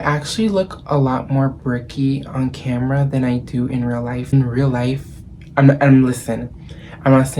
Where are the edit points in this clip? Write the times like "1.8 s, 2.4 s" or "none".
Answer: 4.3 s

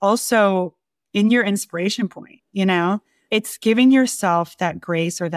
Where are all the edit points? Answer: 3.1 s

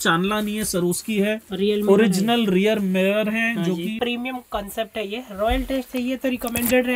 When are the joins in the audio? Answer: 4.0 s

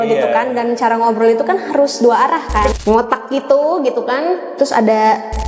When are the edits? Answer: 2.7 s

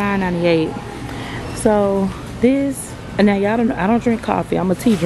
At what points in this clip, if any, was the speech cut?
none

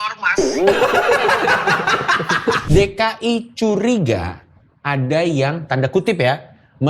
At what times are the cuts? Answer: 2.6 s

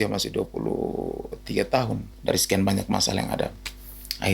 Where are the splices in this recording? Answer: 2.1 s

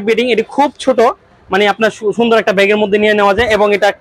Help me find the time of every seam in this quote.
none

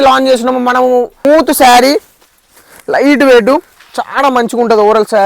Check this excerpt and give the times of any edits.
1.2 s

